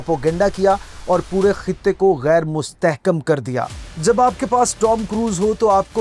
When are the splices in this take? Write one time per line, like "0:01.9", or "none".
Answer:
0:03.9